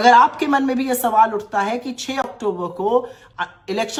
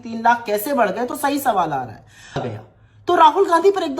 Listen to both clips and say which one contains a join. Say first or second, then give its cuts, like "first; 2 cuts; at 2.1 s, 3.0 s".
second; 1 cut; at 2.4 s